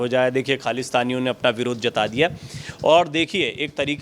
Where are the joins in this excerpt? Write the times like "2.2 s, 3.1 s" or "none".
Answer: none